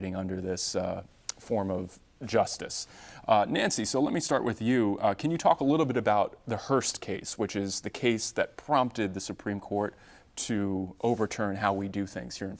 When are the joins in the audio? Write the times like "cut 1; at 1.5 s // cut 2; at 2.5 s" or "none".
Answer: cut 1; at 7.8 s